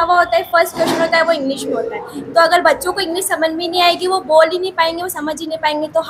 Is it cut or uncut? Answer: uncut